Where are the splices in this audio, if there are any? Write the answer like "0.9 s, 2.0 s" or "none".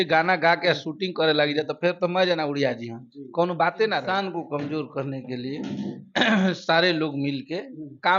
4.1 s